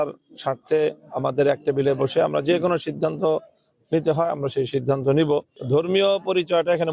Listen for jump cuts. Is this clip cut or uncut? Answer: cut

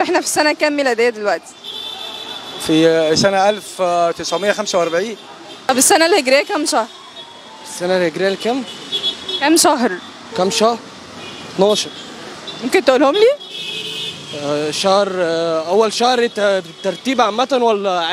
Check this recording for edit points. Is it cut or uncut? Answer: cut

